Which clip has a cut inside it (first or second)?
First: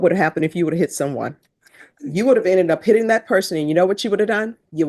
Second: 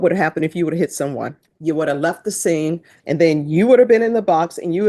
second